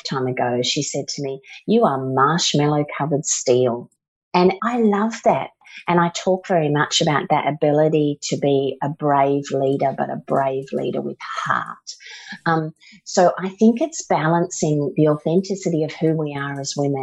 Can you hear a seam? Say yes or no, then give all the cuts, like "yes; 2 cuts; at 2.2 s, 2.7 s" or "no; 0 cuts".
yes; 2 cuts; at 4.4 s, 5.6 s